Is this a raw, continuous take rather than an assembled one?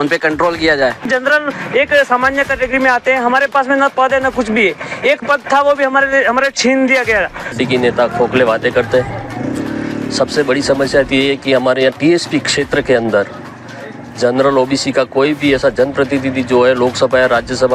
no; 2 cuts; at 1.1 s, 7.5 s

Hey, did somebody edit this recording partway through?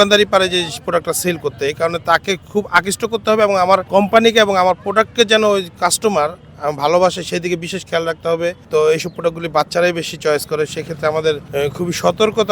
yes; 3 cuts; at 3.9 s, 8.6 s, 11.4 s

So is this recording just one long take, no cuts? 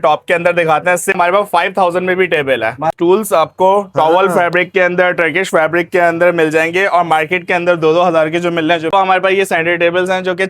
no; 3 cuts; at 1.2 s, 2.9 s, 8.9 s

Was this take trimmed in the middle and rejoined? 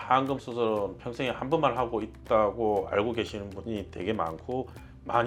no; 0 cuts

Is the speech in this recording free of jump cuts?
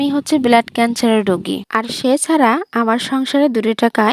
yes; 0 cuts

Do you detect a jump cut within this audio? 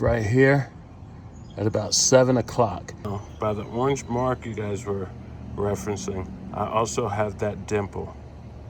yes; 1 cut; at 3.2 s

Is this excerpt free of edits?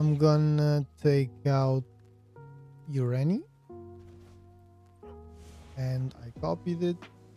no; 2 cuts; at 3.6 s, 5.4 s

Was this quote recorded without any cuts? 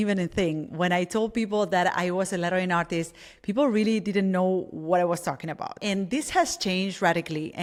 yes; 0 cuts

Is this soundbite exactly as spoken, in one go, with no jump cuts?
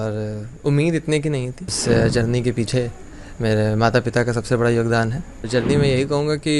no; 2 cuts; at 1.8 s, 5.4 s

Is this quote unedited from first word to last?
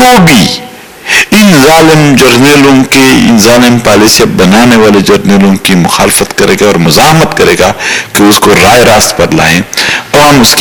yes; 0 cuts

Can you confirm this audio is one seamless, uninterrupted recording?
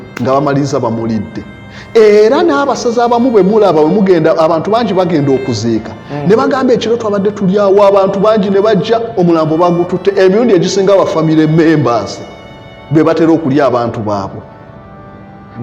yes; 0 cuts

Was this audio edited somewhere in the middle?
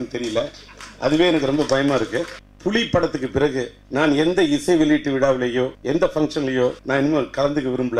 yes; 4 cuts; at 2.4 s, 3.8 s, 5.8 s, 6.8 s

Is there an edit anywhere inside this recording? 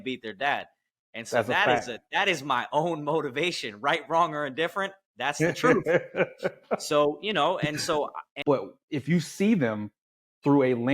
yes; 1 cut; at 8.2 s

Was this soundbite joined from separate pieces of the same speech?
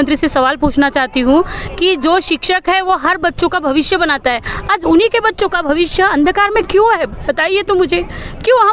no; 0 cuts

